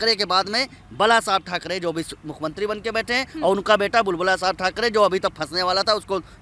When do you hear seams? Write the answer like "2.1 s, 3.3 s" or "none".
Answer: none